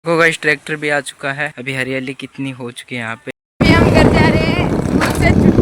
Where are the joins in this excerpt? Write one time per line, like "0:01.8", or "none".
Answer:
0:01.5
0:03.2